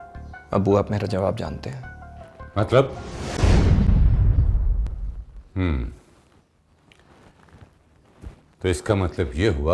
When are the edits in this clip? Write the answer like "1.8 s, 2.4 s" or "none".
none